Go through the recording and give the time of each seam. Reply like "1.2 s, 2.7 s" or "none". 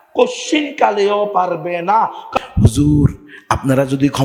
2.2 s